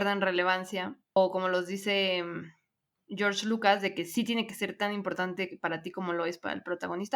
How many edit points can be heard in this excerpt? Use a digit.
1